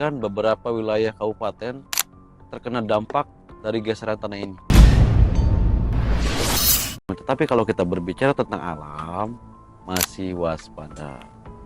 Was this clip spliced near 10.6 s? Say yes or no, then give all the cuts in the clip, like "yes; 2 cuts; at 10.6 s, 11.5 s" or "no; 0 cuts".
no; 2 cuts; at 4.5 s, 7.2 s